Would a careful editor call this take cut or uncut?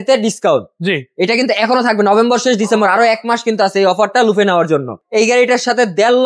cut